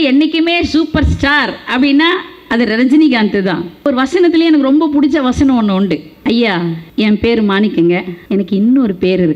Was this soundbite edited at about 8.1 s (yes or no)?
yes